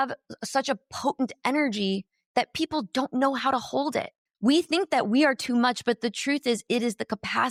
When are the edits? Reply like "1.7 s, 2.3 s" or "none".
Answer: none